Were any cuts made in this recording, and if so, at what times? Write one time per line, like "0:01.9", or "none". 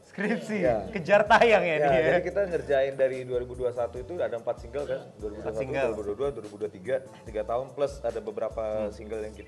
none